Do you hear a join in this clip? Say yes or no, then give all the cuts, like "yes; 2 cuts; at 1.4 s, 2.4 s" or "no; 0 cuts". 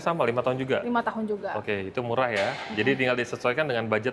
no; 0 cuts